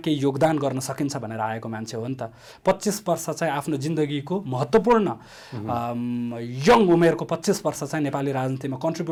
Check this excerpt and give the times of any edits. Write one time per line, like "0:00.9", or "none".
none